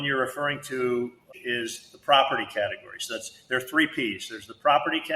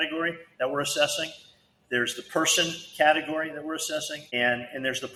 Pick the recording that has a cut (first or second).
first